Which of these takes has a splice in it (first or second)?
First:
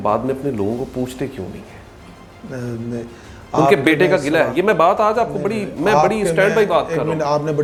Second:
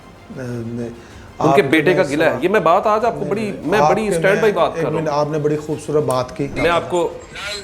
second